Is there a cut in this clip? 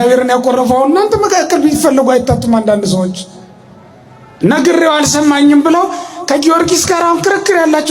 no; 0 cuts

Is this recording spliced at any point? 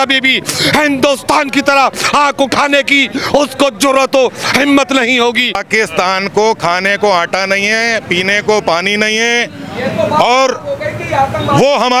yes; 1 cut; at 5.6 s

